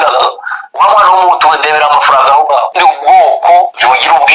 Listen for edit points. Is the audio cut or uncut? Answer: cut